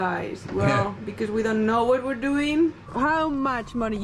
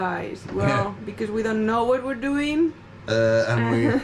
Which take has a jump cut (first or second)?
first